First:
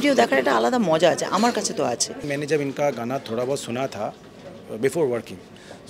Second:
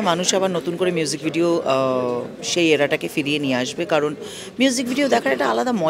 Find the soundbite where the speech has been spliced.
first; 1 cut; at 2.3 s

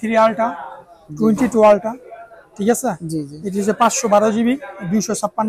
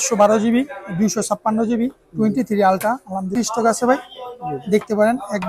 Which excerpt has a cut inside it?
second; 1 cut; at 3.3 s

